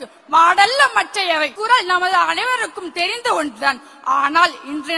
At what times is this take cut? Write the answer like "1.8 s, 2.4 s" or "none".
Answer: 1.5 s